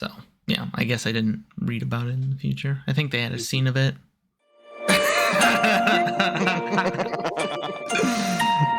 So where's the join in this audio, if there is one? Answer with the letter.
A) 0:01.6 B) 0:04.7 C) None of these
B